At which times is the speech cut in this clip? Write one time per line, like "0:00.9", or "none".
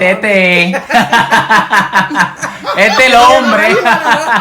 0:02.1